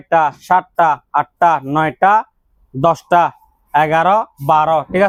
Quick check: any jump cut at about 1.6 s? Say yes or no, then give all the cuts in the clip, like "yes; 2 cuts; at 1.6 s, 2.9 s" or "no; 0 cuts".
no; 0 cuts